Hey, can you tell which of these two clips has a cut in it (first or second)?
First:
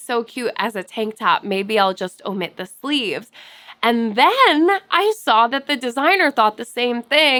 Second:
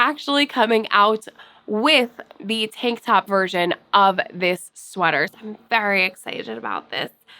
second